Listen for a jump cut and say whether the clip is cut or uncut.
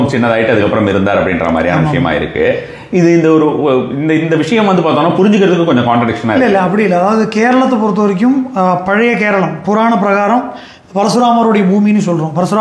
uncut